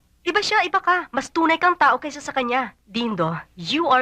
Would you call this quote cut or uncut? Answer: cut